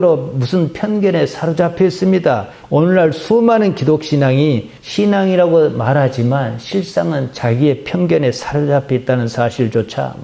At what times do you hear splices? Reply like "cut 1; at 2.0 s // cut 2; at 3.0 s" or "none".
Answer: cut 1; at 2.5 s